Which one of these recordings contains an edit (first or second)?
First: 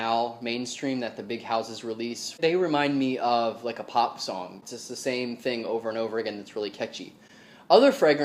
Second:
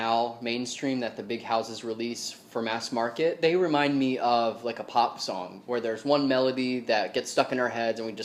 first